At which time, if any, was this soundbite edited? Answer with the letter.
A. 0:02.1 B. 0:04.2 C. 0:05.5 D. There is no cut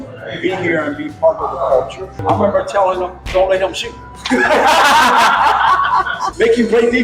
A